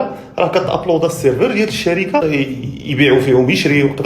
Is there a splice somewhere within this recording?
yes; 1 cut; at 2.2 s

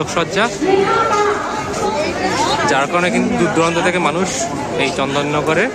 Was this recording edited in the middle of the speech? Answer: no; 0 cuts

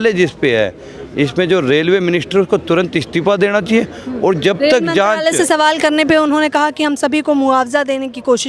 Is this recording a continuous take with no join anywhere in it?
yes; 0 cuts

